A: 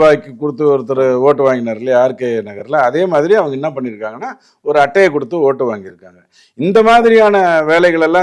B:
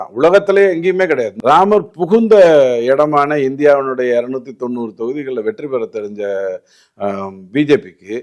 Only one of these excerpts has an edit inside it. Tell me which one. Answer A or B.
B